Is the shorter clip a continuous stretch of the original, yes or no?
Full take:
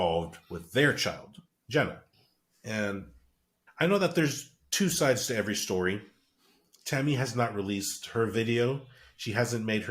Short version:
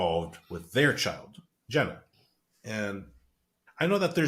yes